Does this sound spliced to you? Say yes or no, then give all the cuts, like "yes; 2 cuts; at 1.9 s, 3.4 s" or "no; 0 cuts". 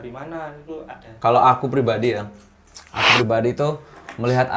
yes; 1 cut; at 1.0 s